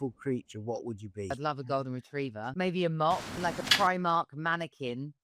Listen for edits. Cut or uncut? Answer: cut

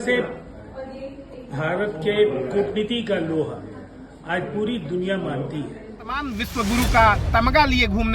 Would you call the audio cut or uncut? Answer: cut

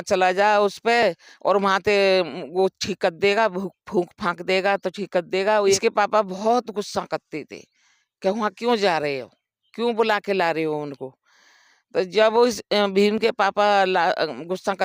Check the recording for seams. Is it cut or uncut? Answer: cut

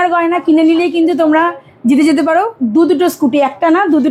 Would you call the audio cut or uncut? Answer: uncut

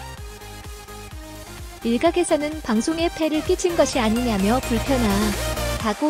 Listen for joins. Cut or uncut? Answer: cut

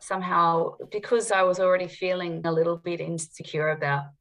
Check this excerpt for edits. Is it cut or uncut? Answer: cut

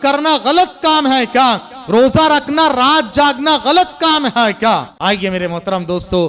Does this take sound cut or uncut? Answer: cut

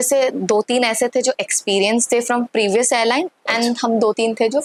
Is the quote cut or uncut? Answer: uncut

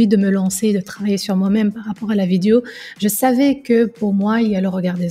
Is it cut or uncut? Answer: uncut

